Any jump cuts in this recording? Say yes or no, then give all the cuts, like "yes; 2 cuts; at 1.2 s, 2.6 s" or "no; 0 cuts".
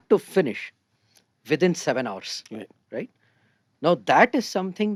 no; 0 cuts